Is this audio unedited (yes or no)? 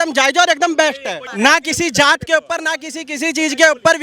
no